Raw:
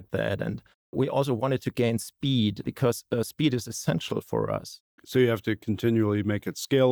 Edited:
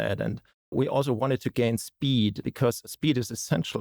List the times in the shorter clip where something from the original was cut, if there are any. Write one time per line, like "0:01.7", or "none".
0:02.9